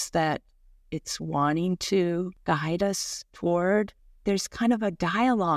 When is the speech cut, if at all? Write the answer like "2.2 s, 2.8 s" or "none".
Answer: 2.4 s, 4.0 s